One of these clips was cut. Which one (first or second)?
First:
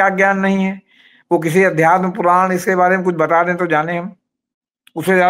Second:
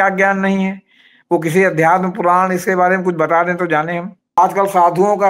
second